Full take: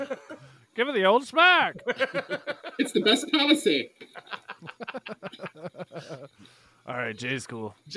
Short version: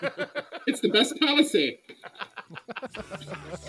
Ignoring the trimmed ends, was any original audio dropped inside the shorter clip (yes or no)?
no